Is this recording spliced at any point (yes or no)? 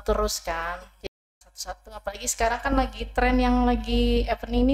yes